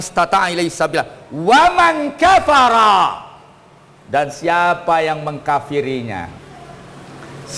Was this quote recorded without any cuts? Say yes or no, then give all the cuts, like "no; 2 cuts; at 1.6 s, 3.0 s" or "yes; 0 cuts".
yes; 0 cuts